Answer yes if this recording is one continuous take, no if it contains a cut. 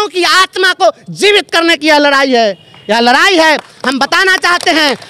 yes